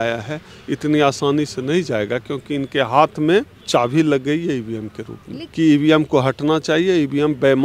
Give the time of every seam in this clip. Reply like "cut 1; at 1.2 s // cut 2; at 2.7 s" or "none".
cut 1; at 3.6 s // cut 2; at 5.4 s